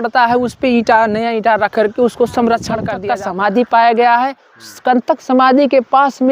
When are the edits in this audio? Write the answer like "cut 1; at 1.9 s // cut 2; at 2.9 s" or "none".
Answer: cut 1; at 2.9 s